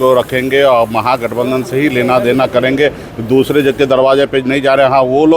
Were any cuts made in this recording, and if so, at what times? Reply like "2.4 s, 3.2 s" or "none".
none